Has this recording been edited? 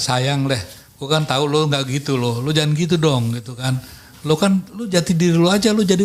no; 0 cuts

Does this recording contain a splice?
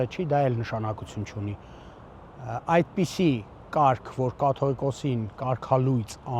no; 0 cuts

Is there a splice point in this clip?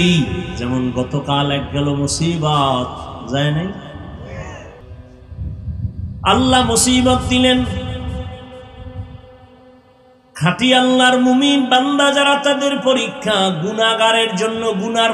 yes; 1 cut; at 4.9 s

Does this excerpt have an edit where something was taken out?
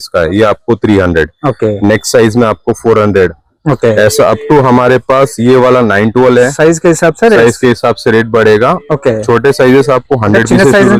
no; 0 cuts

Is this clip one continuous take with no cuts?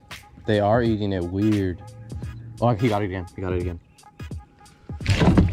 yes; 0 cuts

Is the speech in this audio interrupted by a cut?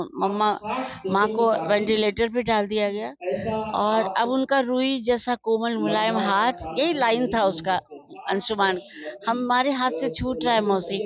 no; 0 cuts

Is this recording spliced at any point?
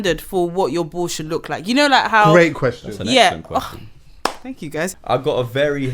yes; 1 cut; at 4.9 s

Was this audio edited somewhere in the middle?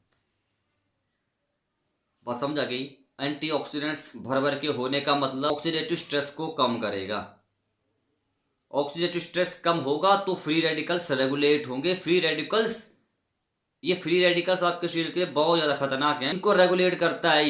yes; 2 cuts; at 5.5 s, 16.4 s

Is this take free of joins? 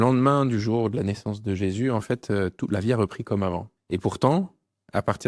no; 1 cut; at 3.7 s

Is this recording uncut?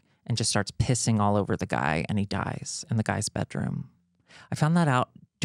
yes; 0 cuts

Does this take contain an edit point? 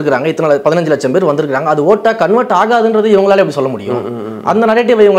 no; 0 cuts

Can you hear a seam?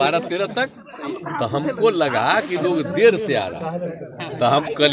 no; 0 cuts

